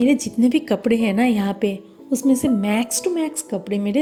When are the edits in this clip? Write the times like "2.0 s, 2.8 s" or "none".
none